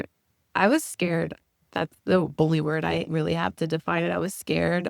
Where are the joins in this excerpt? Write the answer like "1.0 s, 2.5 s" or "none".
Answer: 1.7 s